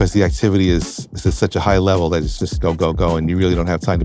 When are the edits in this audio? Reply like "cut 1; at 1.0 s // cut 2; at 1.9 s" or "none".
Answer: none